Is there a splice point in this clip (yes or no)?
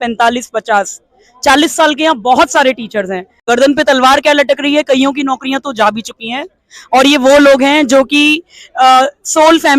yes